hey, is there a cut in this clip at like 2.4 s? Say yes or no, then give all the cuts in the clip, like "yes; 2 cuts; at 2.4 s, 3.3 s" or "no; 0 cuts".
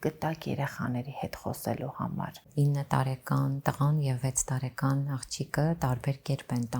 yes; 1 cut; at 2.4 s